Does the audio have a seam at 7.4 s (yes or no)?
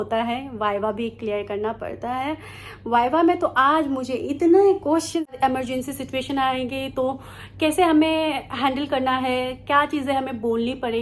no